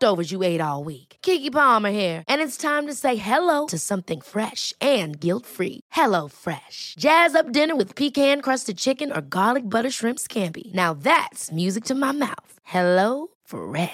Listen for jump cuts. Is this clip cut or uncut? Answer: uncut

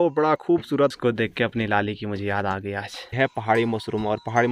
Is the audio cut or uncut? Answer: cut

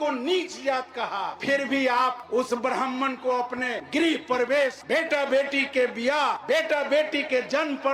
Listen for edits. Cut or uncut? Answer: cut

